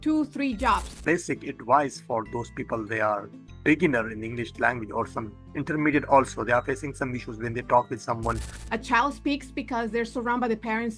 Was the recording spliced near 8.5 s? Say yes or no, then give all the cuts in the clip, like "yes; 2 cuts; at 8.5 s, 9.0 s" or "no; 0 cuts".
yes; 2 cuts; at 0.9 s, 8.5 s